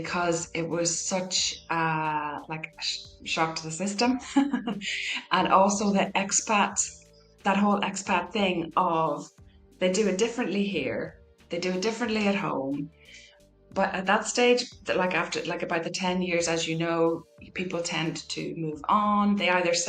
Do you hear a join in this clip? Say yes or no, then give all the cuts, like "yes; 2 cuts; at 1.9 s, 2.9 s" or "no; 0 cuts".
no; 0 cuts